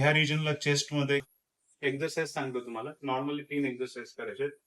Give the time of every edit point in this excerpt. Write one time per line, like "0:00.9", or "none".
0:01.2